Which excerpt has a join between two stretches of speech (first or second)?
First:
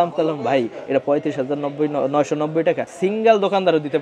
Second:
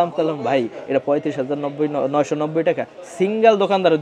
first